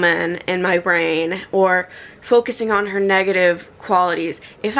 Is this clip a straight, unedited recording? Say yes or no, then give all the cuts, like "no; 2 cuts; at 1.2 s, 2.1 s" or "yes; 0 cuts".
yes; 0 cuts